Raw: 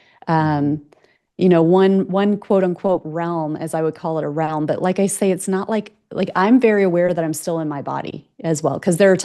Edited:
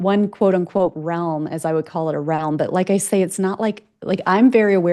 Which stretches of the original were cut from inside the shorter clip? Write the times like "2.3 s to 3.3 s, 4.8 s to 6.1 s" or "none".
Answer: none